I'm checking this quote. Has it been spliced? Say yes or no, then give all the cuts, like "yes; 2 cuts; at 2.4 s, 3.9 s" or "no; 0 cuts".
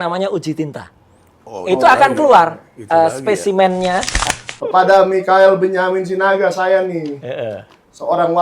yes; 1 cut; at 4.2 s